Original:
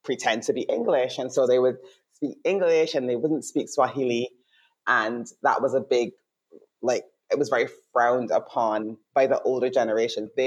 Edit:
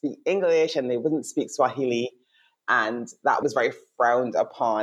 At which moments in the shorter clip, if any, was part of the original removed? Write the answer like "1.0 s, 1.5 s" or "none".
3.4 s